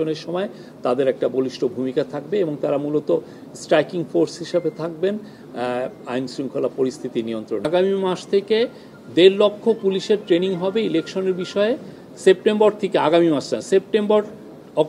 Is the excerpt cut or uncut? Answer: cut